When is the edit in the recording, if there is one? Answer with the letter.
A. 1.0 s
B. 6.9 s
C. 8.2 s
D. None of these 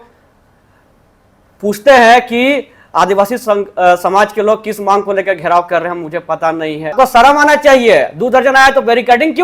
B